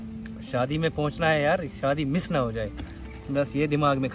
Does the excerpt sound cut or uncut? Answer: uncut